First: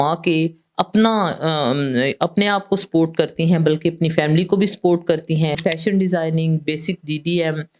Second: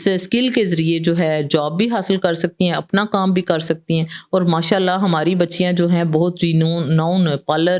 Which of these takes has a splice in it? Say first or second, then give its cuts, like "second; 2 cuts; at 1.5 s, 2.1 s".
first; 1 cut; at 5.6 s